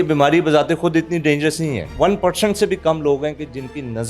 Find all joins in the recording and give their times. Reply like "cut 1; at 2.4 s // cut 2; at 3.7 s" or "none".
cut 1; at 1.9 s